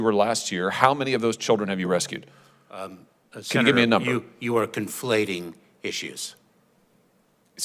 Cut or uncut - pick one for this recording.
uncut